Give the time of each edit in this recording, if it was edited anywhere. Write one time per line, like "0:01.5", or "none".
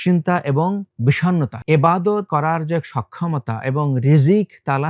0:01.2
0:02.3